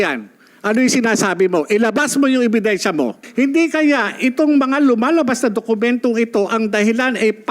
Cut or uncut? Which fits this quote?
cut